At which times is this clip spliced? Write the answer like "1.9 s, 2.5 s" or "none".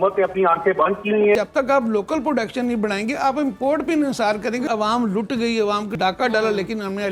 1.3 s, 4.6 s, 5.9 s